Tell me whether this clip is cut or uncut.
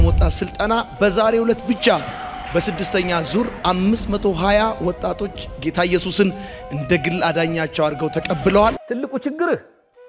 uncut